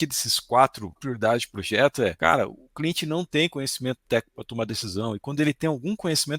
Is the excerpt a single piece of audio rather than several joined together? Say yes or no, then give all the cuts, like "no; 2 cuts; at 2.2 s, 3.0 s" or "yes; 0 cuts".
no; 2 cuts; at 1.0 s, 2.2 s